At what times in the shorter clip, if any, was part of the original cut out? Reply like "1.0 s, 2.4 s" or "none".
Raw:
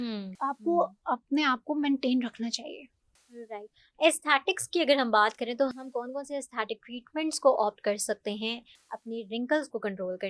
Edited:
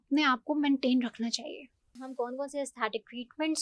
2.0 s